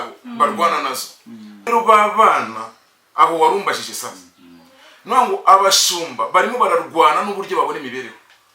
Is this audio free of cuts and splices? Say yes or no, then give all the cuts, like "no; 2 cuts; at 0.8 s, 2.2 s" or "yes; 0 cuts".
no; 1 cut; at 1.7 s